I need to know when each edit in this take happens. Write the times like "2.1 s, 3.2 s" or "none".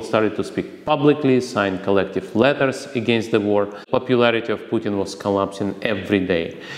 3.8 s